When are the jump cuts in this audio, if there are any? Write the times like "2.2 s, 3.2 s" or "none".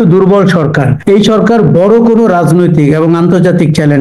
0.9 s